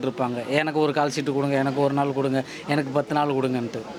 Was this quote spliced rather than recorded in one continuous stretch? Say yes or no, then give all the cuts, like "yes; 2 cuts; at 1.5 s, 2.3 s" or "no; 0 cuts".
no; 0 cuts